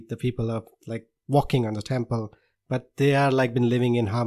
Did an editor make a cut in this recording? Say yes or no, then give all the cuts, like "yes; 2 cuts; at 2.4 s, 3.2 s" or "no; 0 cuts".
no; 0 cuts